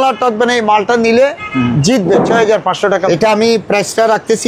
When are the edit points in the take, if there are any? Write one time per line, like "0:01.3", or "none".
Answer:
0:03.0